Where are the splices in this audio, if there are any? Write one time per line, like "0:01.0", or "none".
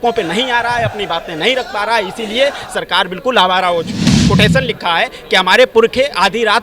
0:04.1